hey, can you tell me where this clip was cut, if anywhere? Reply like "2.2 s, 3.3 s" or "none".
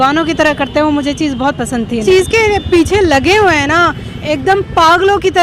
2.0 s